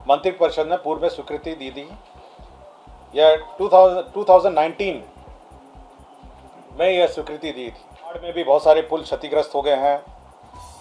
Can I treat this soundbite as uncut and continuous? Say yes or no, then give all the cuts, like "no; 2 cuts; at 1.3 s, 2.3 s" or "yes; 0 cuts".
no; 1 cut; at 8.3 s